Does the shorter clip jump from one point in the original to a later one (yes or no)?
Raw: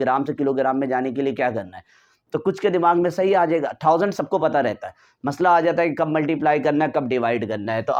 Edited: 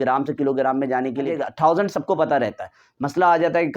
yes